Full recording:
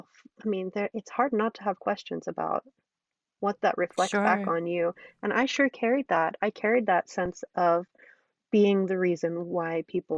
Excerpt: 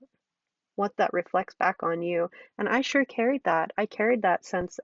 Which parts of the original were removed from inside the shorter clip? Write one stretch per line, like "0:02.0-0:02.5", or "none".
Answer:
none